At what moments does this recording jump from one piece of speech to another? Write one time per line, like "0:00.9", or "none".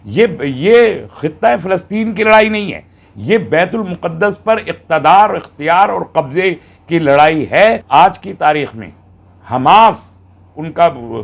0:07.8